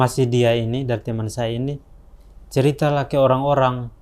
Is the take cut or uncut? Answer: uncut